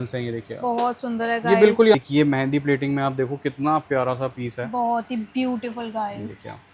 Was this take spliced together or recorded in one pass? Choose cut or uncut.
cut